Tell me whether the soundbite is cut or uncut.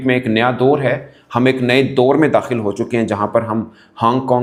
uncut